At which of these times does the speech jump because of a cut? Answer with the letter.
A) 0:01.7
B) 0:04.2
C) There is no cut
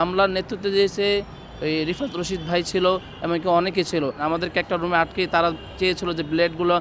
B